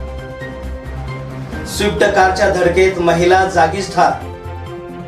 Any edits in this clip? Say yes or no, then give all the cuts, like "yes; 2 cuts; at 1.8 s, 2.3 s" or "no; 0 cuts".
yes; 1 cut; at 1.2 s